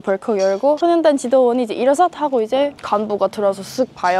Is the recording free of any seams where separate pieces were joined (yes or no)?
yes